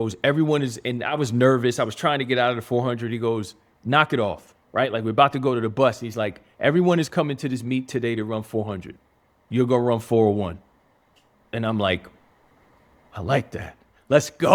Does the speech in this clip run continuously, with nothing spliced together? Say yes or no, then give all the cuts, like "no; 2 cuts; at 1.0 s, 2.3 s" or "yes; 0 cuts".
yes; 0 cuts